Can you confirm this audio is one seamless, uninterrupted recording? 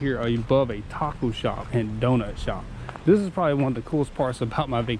yes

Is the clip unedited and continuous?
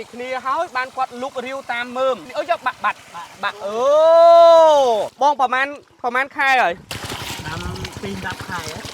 no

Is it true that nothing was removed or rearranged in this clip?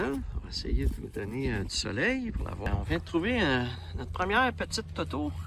no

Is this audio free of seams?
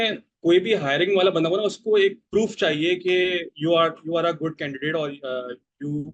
yes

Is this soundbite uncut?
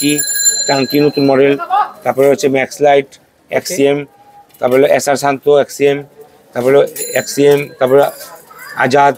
yes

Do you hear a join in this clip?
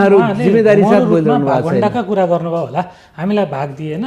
no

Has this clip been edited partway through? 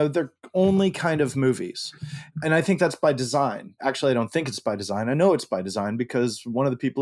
yes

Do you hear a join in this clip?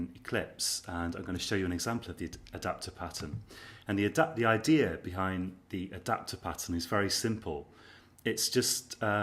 yes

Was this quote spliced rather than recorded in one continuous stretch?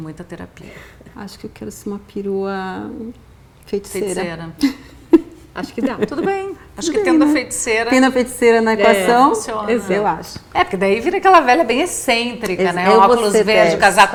no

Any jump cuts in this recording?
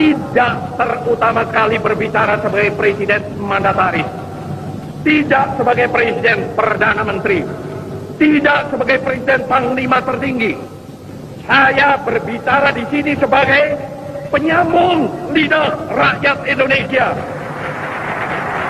no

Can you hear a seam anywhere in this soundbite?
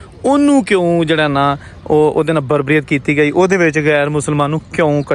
no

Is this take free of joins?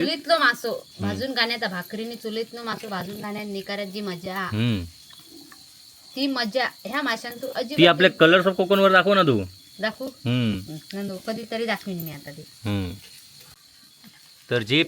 yes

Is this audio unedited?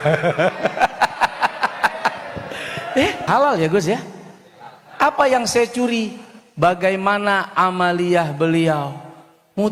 no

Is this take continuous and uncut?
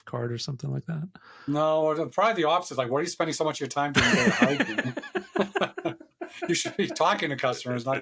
yes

